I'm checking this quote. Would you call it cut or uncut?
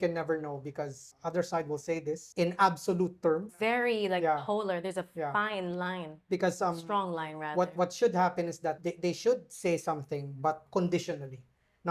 cut